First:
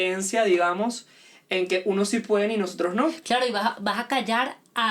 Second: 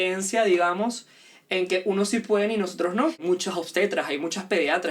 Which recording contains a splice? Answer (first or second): second